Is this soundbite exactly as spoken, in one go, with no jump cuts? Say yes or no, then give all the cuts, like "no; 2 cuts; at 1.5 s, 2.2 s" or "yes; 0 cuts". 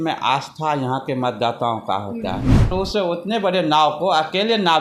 no; 1 cut; at 2.7 s